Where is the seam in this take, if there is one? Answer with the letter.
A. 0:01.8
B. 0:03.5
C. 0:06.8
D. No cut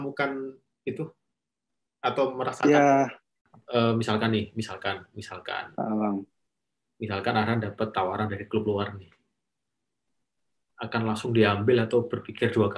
B